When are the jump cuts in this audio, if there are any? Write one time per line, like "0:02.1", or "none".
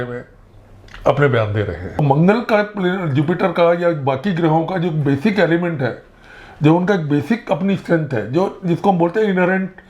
0:02.0